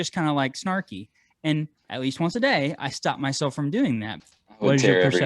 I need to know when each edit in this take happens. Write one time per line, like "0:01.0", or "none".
0:04.1